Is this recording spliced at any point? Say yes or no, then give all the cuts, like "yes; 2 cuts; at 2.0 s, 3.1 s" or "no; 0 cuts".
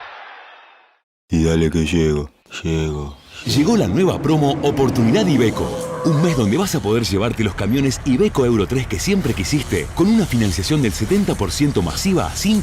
yes; 1 cut; at 1.2 s